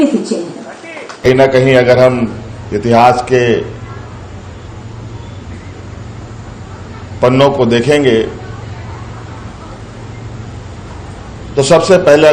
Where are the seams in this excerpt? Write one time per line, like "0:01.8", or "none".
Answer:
0:01.2